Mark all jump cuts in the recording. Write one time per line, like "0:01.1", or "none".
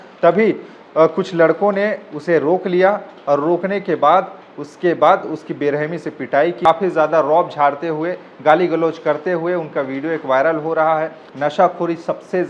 0:06.6
0:11.2